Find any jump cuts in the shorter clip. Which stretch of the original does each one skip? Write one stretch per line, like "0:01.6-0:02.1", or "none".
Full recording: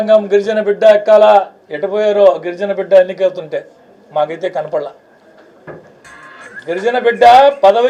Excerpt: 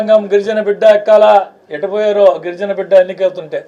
none